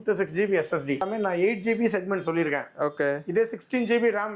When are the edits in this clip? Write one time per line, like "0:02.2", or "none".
0:01.0